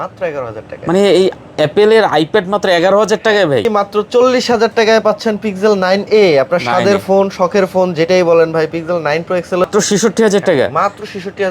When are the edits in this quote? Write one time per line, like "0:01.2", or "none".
0:03.6
0:09.6